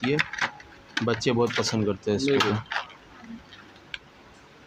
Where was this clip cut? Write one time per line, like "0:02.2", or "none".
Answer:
none